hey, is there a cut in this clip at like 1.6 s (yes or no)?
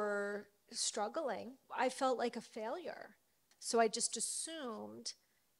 yes